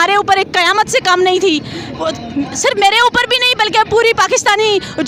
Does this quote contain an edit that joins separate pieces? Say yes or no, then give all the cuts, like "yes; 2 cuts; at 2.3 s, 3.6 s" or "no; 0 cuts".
no; 0 cuts